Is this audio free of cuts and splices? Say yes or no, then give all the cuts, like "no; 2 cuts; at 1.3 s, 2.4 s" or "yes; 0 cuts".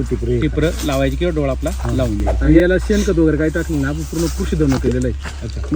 yes; 0 cuts